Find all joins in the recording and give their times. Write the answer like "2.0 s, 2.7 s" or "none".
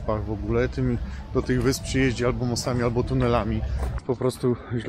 4.0 s